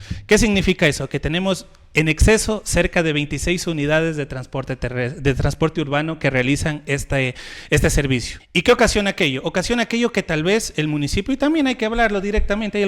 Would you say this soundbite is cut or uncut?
cut